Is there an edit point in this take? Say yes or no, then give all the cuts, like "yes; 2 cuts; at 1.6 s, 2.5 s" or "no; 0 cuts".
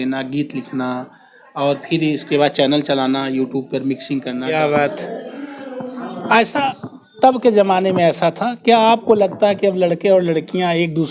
yes; 1 cut; at 4.4 s